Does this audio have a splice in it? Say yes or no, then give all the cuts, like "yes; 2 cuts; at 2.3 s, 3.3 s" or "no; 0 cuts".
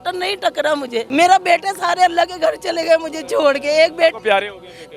yes; 1 cut; at 1.0 s